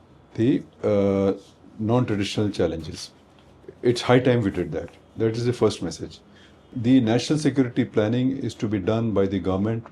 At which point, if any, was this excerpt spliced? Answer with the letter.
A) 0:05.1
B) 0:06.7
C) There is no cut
B